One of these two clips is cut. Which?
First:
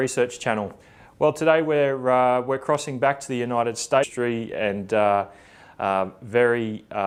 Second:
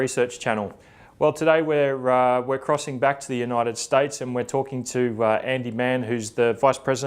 second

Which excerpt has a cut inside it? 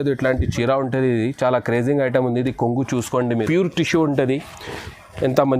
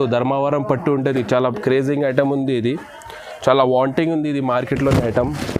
first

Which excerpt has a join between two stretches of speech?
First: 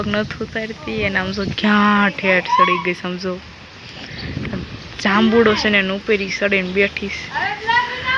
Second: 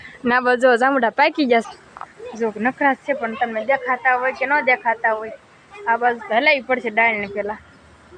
second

